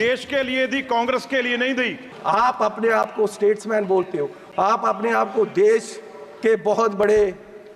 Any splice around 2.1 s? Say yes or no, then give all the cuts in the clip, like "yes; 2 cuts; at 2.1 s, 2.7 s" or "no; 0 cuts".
yes; 1 cut; at 2.1 s